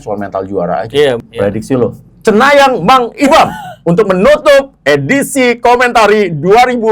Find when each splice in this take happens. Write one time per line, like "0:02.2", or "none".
0:01.2